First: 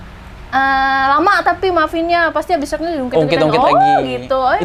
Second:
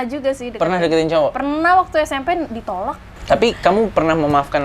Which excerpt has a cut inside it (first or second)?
second